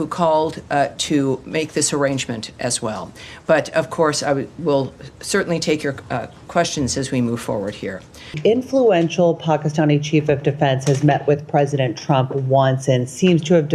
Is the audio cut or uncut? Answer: cut